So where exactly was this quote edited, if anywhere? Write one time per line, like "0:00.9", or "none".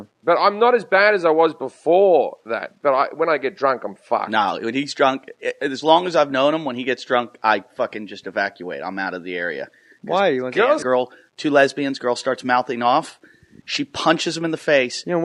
none